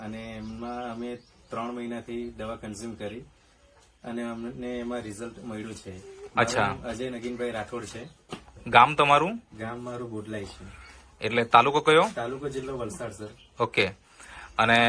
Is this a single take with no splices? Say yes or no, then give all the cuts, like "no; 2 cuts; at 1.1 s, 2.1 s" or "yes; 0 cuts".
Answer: yes; 0 cuts